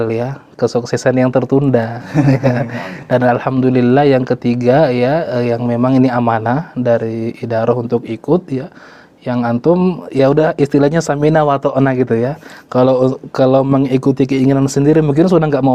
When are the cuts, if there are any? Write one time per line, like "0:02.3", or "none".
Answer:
none